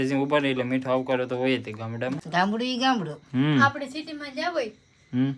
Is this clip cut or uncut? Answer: cut